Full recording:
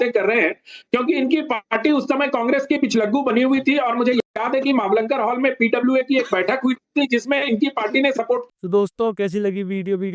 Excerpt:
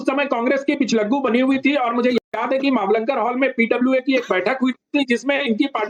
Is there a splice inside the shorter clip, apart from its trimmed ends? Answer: no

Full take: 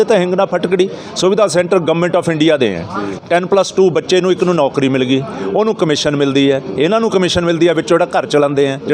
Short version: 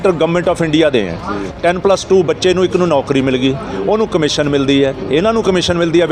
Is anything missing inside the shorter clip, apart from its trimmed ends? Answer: no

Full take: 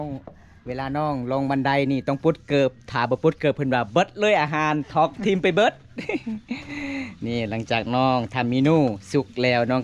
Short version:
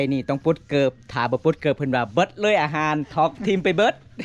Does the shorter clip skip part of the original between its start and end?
no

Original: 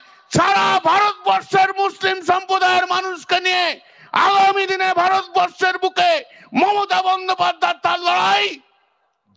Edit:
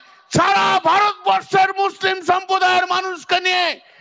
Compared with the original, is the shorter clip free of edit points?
yes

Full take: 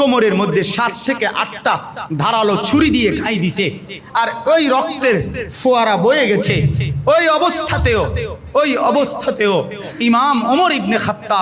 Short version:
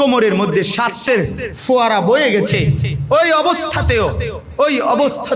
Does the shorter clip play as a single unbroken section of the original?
no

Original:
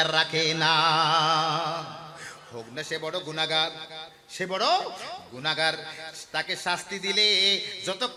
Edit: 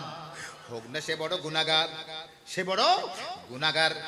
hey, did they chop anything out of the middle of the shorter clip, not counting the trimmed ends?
no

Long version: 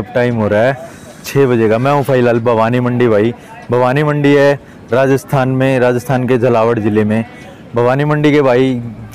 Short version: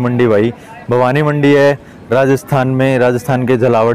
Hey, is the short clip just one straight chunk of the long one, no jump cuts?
yes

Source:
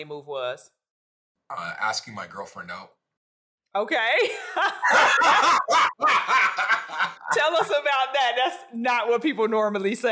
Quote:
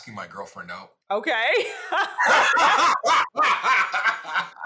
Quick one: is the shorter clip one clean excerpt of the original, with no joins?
no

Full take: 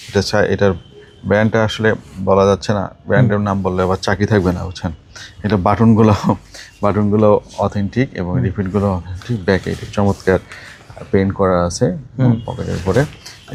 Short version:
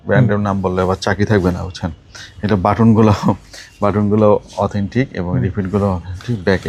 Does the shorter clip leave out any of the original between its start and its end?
no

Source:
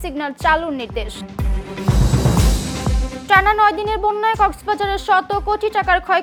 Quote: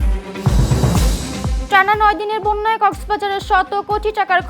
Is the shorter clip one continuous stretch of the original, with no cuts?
no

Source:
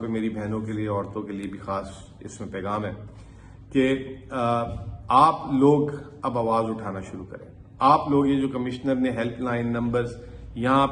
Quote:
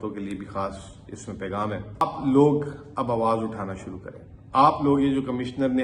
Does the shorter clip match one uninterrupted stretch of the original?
no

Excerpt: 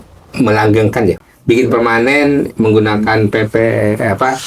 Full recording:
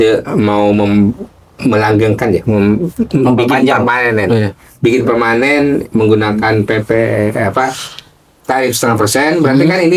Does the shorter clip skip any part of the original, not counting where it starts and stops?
yes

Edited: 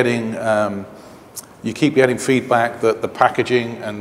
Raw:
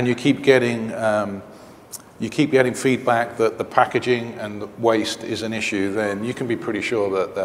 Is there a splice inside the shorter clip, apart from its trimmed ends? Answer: no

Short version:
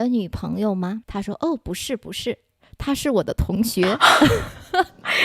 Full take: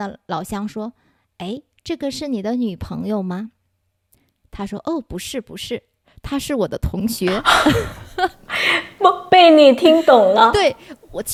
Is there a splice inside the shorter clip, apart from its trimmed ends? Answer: yes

